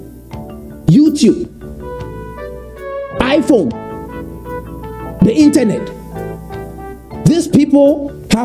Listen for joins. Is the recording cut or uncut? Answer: cut